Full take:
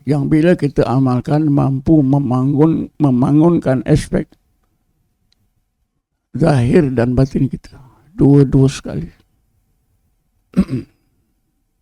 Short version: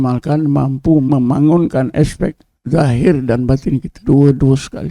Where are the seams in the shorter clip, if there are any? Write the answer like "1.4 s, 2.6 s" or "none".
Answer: 1.1 s, 2.5 s, 3.9 s